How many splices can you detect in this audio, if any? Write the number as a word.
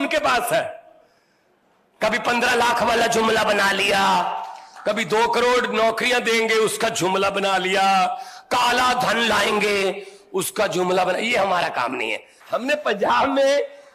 one